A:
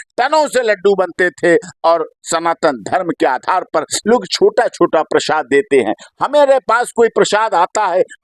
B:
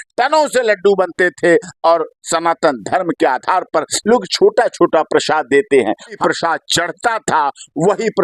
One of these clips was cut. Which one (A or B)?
B